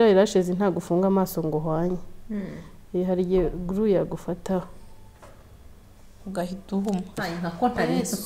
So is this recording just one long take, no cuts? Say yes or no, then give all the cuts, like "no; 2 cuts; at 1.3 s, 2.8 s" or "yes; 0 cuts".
no; 1 cut; at 7.2 s